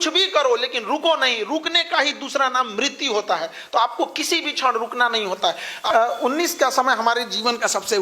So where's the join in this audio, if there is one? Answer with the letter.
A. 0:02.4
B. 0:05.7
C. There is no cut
B